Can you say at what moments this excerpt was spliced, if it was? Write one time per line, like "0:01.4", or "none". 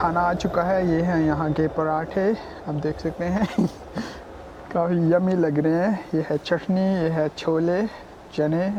none